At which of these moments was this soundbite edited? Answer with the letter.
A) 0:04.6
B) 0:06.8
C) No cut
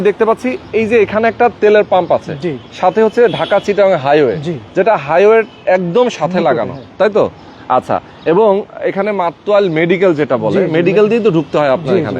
C